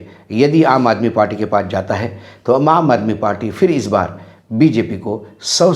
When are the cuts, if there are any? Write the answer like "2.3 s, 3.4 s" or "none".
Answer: none